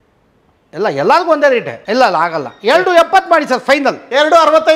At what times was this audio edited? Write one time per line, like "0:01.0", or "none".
0:01.8